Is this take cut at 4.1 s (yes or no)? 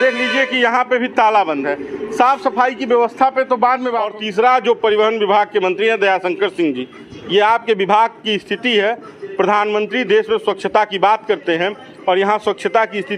yes